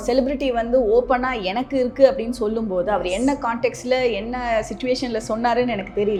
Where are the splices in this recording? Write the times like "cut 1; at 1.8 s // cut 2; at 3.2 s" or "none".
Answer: none